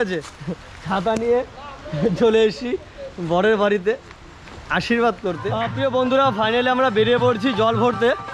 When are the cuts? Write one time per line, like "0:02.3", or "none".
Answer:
0:05.6